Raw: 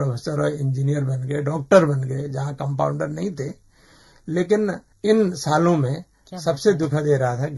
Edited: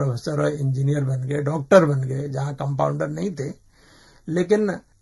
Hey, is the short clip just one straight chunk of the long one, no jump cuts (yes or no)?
yes